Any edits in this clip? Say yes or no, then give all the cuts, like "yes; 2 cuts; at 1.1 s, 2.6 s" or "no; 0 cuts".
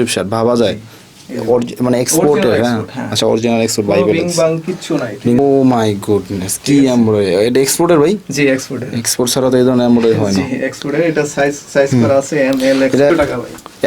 yes; 2 cuts; at 5.4 s, 13.1 s